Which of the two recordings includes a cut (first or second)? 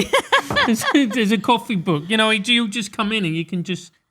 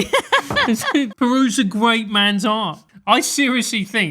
second